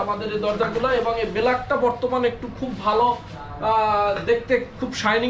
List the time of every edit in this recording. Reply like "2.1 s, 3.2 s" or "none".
none